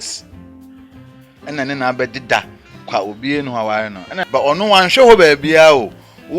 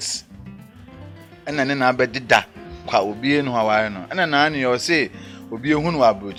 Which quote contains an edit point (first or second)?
first